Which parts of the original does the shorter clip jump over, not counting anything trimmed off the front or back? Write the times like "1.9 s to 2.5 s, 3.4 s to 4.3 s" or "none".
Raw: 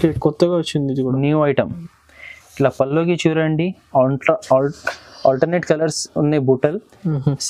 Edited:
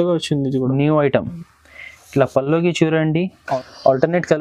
3.9 s to 4.8 s